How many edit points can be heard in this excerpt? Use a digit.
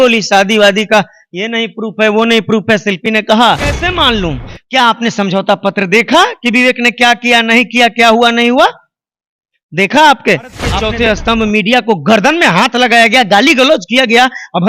2